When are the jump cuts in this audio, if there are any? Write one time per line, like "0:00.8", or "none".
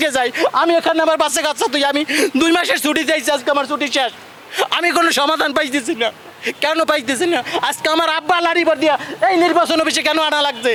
none